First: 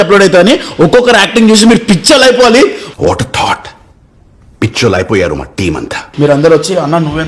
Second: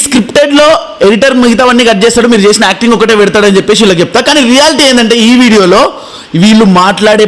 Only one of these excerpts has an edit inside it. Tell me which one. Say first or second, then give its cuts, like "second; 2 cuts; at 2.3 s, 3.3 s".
first; 1 cut; at 5.9 s